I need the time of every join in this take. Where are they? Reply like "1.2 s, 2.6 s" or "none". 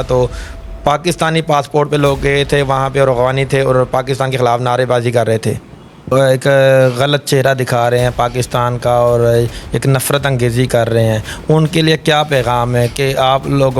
6.1 s